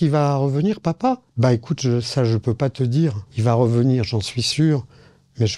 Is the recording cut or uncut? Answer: uncut